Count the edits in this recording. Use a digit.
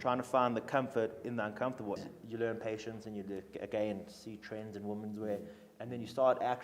1